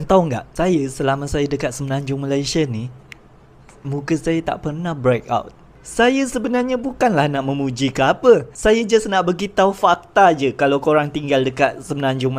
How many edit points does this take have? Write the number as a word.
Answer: zero